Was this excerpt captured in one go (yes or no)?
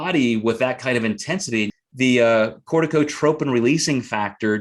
no